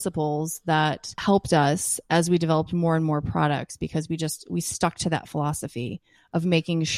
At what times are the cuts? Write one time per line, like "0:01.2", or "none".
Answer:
0:01.1